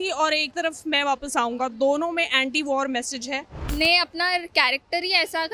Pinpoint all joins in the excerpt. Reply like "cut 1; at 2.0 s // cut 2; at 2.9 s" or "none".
cut 1; at 3.5 s